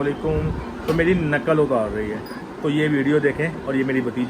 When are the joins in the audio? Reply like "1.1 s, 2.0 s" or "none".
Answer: 2.3 s